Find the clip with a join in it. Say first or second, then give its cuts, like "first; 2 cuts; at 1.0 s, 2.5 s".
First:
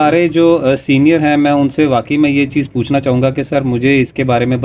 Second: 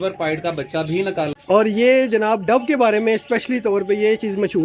second; 1 cut; at 1.4 s